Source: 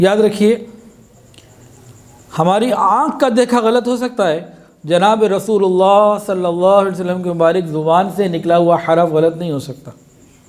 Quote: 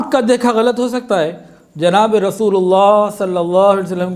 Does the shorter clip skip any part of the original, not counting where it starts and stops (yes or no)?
no